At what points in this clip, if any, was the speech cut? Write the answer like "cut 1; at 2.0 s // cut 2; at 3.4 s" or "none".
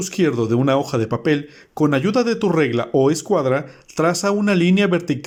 none